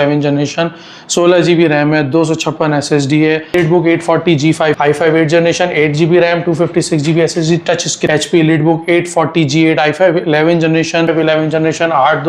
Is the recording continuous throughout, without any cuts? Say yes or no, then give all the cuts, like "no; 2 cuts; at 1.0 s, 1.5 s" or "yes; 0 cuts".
no; 4 cuts; at 3.5 s, 4.8 s, 8.1 s, 11.1 s